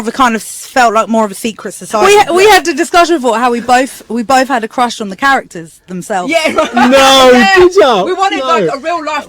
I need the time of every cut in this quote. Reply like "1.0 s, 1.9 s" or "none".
2.0 s